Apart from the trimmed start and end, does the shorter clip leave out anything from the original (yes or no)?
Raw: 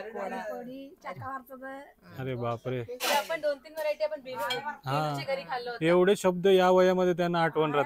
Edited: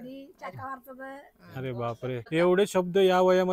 yes